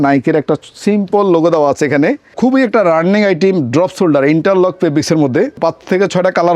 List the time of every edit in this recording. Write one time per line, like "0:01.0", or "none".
0:02.3
0:05.6